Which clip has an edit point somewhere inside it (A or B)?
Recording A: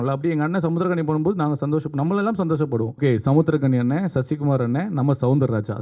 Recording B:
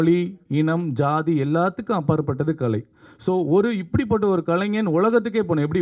A